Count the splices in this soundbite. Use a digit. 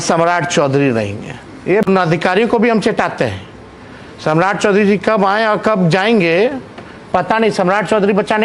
1